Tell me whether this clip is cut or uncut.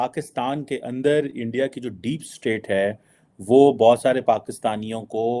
uncut